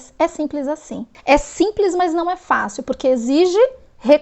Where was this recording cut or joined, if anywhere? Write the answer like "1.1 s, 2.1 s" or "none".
1.1 s